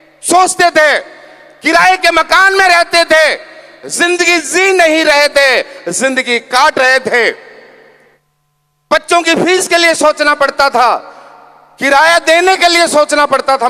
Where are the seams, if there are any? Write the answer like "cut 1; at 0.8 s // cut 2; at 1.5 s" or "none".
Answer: none